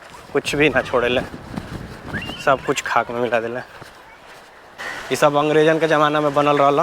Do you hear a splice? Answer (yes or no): yes